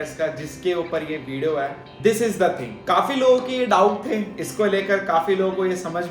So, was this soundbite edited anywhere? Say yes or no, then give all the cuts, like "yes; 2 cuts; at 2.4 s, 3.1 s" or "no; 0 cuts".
yes; 2 cuts; at 1.9 s, 2.7 s